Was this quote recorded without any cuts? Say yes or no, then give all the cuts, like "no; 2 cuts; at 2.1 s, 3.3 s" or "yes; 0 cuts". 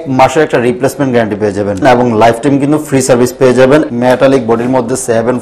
no; 2 cuts; at 1.8 s, 3.9 s